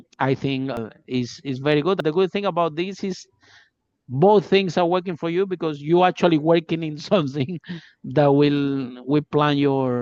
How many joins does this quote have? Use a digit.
2